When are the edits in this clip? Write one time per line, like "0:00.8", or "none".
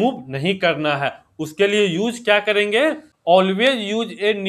0:03.1

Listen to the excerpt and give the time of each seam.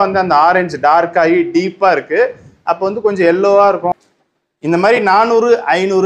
0:03.9

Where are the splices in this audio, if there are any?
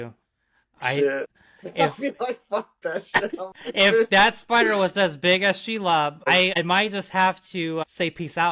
0:06.6
0:07.8

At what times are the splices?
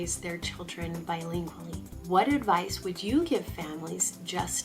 0:01.9

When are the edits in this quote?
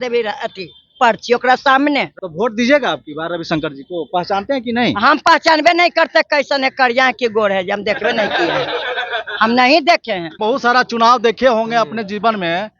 0:02.1
0:10.4

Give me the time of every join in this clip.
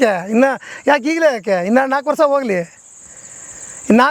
none

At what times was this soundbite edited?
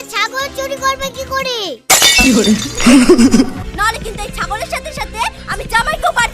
0:03.6

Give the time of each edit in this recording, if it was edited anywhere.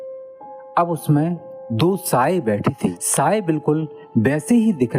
0:03.0

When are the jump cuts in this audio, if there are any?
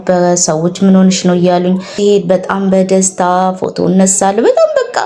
0:01.9

